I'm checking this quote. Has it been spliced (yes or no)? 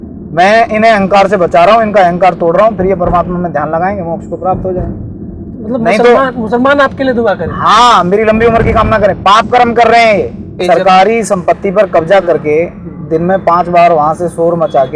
yes